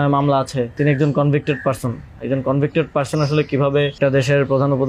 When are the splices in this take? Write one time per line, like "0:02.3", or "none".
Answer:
0:00.8
0:04.0